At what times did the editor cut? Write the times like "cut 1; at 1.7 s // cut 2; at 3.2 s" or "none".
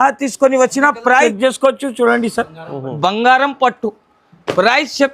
cut 1; at 1.3 s

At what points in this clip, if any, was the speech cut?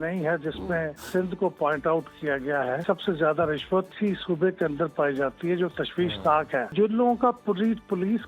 cut 1; at 1.0 s // cut 2; at 2.8 s // cut 3; at 3.9 s // cut 4; at 6.7 s

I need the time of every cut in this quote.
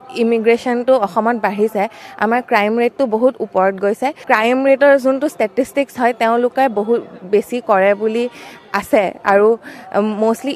cut 1; at 4.2 s

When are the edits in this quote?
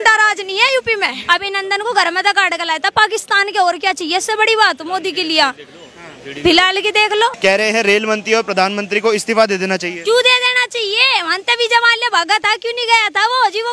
cut 1; at 1.2 s // cut 2; at 7.4 s

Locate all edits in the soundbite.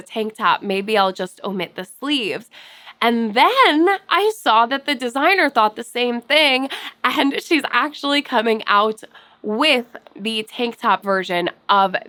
none

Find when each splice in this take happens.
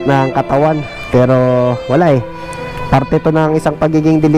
cut 1; at 0.9 s

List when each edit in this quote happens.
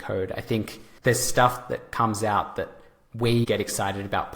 cut 1; at 3.5 s

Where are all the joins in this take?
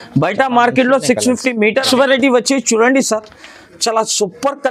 cut 1; at 1.9 s

